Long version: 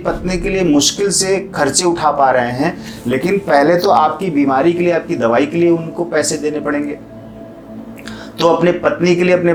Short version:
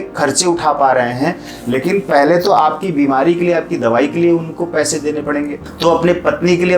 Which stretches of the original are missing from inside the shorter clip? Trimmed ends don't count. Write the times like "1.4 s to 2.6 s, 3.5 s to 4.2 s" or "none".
7.0 s to 8.2 s